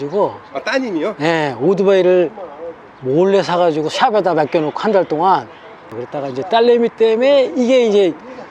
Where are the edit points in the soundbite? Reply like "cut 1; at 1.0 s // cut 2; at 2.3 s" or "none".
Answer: cut 1; at 5.9 s